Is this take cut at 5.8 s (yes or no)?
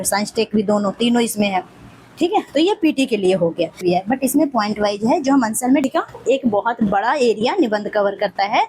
yes